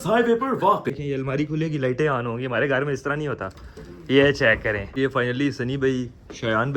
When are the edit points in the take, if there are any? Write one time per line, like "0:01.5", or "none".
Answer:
0:00.9
0:04.9

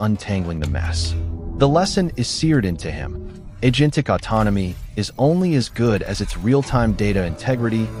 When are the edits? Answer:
none

